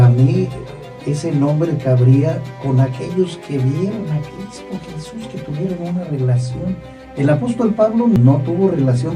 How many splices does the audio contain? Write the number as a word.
one